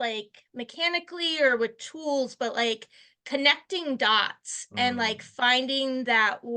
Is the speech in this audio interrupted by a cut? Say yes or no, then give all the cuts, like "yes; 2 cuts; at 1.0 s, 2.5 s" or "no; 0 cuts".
no; 0 cuts